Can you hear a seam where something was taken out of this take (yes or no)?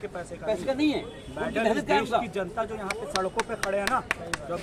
no